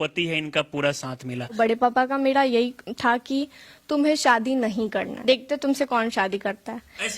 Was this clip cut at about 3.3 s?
no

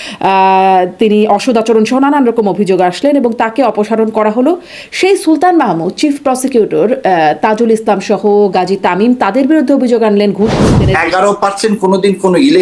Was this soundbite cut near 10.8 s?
yes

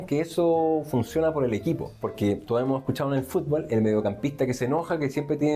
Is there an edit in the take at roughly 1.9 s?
yes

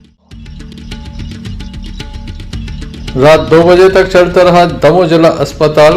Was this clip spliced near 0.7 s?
yes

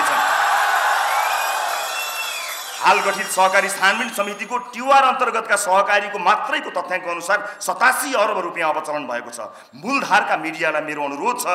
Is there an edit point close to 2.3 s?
no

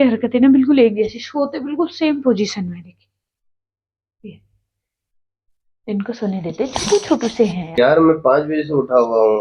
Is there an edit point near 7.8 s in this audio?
yes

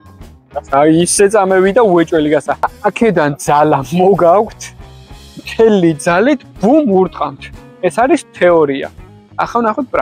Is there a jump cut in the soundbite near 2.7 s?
yes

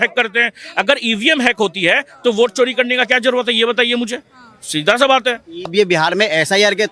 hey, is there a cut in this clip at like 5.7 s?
yes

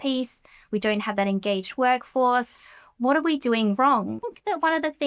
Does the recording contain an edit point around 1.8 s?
no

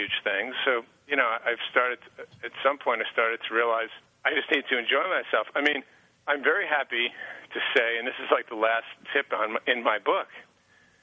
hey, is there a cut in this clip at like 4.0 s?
yes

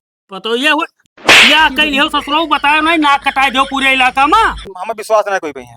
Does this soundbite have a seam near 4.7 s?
yes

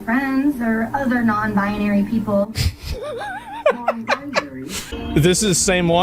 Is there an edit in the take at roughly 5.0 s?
yes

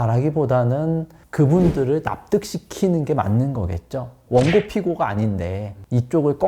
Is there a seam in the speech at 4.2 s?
yes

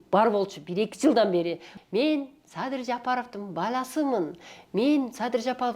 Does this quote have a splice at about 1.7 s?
yes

